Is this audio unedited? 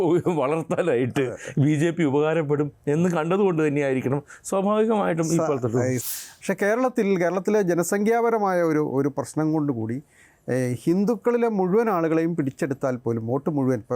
no; 1 cut; at 6.0 s

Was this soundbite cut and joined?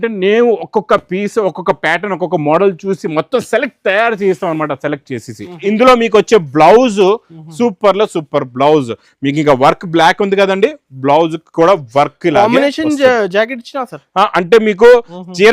yes; 1 cut; at 5.6 s

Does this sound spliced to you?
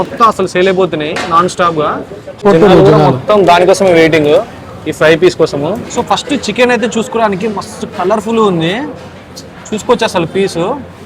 yes; 2 cuts; at 2.4 s, 5.9 s

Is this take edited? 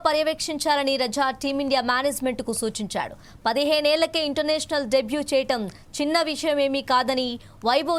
no; 0 cuts

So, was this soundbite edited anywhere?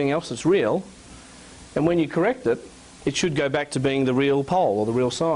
no; 0 cuts

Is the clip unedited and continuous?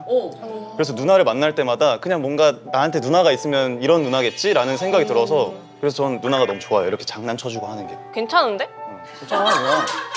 no; 1 cut; at 7.9 s

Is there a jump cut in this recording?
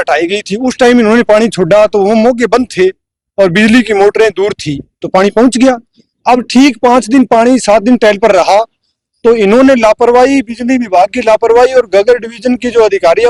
no; 0 cuts

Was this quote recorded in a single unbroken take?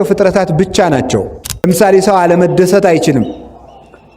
no; 1 cut; at 1.7 s

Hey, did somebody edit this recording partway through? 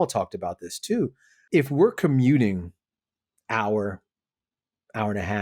yes; 1 cut; at 1.3 s

